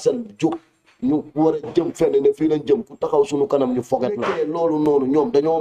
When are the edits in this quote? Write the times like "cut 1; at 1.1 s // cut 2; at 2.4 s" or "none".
cut 1; at 4.3 s